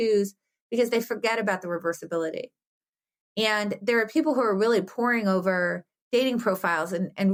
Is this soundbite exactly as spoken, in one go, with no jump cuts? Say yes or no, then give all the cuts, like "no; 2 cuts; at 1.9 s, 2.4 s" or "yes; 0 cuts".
yes; 0 cuts